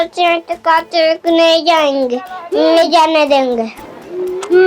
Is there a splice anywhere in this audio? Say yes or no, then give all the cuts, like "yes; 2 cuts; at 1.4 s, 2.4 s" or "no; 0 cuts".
yes; 1 cut; at 3.8 s